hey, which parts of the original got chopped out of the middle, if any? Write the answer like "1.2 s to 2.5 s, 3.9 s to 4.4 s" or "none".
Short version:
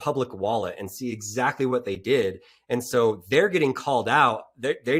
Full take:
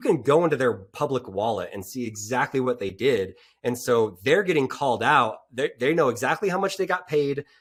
none